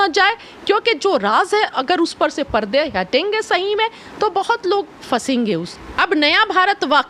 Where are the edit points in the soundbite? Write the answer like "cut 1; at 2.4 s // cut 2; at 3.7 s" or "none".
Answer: cut 1; at 5.7 s